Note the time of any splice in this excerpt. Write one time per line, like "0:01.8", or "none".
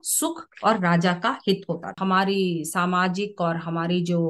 0:01.9